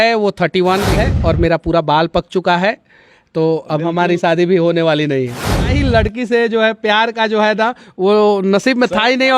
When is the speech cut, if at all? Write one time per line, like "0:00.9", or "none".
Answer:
0:01.0
0:05.7